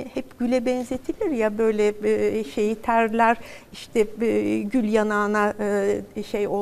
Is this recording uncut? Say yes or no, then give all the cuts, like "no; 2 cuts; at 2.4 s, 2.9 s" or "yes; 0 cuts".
yes; 0 cuts